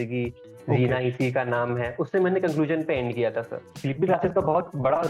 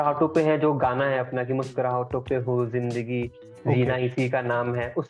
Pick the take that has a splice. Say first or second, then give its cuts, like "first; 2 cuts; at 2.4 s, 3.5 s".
first; 1 cut; at 3.6 s